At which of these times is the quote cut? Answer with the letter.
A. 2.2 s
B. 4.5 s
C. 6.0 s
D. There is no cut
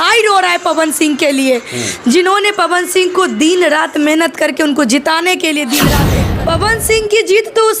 C